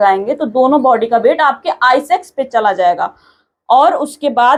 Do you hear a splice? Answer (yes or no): no